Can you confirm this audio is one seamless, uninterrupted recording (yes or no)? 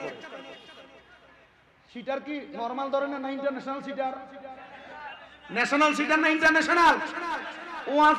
yes